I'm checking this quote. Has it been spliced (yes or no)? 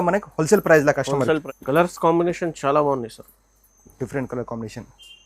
yes